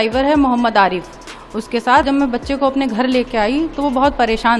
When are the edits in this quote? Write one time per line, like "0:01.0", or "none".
0:02.0

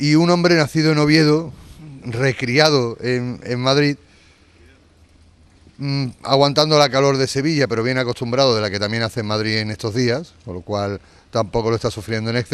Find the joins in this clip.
0:06.1

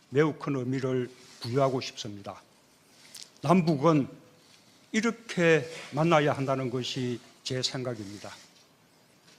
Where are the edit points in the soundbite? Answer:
0:04.4

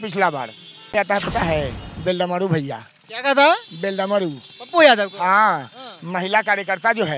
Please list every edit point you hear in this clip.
0:00.9

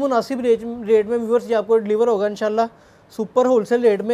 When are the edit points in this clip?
none

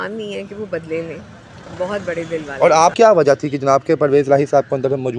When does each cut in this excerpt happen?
0:02.9

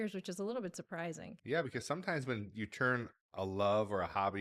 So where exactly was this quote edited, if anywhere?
0:01.3

